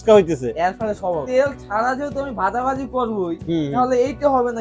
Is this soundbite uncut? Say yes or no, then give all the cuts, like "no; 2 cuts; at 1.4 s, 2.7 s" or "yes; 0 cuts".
no; 1 cut; at 1.3 s